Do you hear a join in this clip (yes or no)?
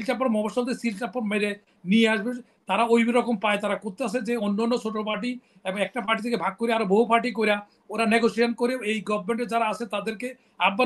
no